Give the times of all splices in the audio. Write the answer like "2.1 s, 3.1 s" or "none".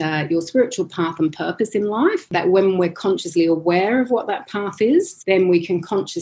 2.3 s, 5.1 s